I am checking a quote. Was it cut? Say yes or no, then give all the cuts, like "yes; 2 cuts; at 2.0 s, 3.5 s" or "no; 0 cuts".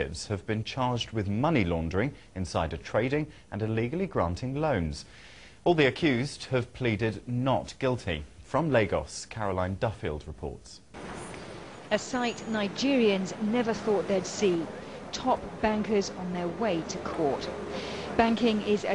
no; 0 cuts